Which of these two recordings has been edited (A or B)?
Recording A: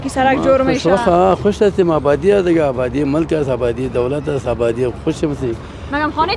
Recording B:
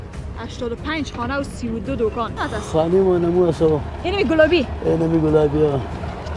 B